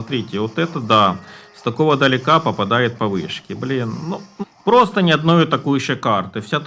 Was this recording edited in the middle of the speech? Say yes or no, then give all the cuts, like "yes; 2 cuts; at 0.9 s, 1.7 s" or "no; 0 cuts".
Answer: yes; 1 cut; at 4.3 s